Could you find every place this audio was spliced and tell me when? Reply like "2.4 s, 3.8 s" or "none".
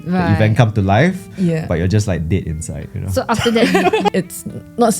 4.1 s